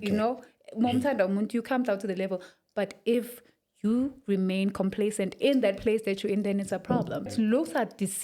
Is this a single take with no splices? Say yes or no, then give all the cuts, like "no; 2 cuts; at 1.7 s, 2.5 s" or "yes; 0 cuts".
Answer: no; 1 cut; at 7.3 s